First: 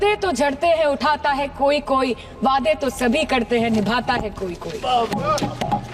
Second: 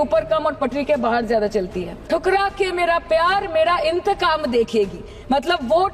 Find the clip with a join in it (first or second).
second